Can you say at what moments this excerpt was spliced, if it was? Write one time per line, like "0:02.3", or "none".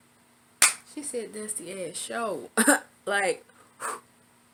none